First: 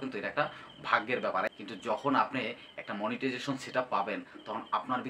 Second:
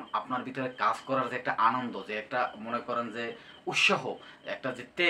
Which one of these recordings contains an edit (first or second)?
first